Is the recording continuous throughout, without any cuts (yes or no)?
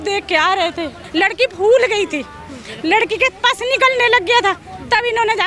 no